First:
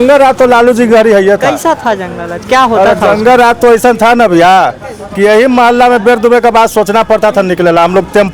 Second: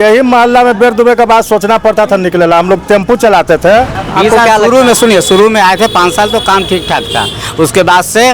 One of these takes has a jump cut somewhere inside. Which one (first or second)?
second